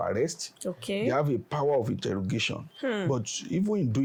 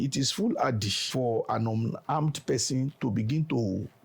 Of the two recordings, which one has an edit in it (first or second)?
second